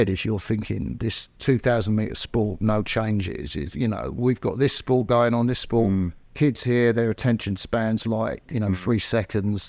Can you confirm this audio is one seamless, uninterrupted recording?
yes; 0 cuts

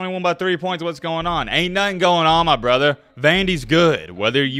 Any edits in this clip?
no; 0 cuts

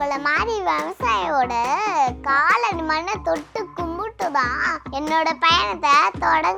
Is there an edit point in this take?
yes; 1 cut; at 4.8 s

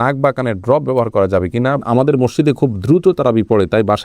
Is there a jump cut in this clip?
yes; 1 cut; at 1.8 s

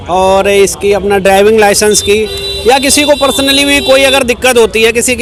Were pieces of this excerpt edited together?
no; 0 cuts

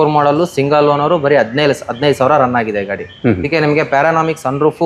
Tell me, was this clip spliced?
no; 0 cuts

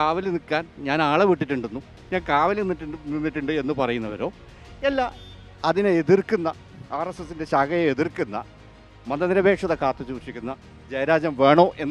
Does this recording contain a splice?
no; 0 cuts

